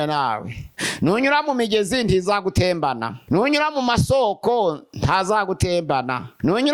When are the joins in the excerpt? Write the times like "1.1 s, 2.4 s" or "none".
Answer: none